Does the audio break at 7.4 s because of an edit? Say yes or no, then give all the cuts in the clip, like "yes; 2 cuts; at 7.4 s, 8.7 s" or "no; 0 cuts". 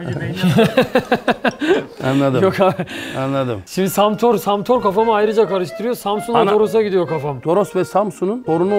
yes; 1 cut; at 7.4 s